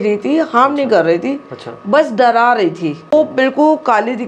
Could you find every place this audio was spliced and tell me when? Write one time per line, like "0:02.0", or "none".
0:03.1